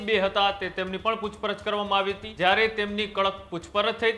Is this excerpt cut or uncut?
cut